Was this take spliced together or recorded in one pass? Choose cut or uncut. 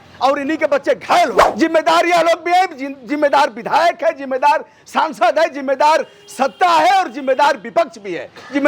cut